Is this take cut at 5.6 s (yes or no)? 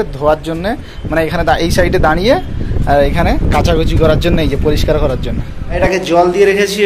yes